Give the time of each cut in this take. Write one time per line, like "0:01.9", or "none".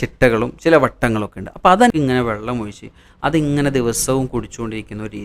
0:01.9